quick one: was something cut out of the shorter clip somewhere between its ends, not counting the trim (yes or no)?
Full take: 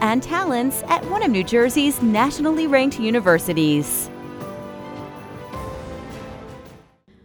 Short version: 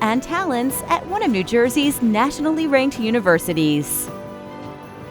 yes